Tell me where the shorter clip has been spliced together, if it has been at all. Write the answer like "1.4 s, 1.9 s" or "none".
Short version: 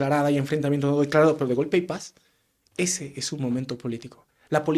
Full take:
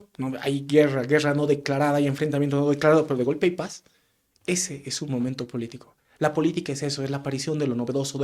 none